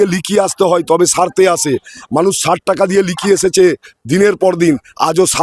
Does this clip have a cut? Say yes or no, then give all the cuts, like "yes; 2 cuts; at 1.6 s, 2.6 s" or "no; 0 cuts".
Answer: no; 0 cuts